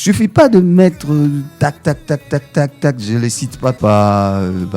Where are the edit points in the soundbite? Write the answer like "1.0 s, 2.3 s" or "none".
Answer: 3.8 s